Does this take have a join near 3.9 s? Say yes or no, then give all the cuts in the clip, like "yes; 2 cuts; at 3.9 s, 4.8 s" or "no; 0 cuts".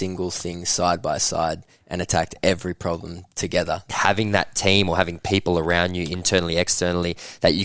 yes; 1 cut; at 3.9 s